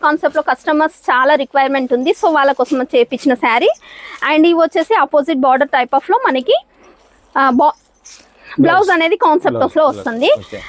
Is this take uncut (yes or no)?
yes